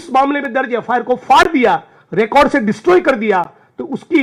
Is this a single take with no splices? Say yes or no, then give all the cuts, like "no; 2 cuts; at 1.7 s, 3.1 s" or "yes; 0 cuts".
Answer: yes; 0 cuts